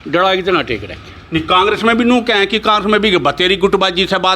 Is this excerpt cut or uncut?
uncut